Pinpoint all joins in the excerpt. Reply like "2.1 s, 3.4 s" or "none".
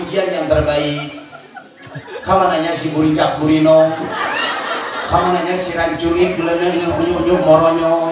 none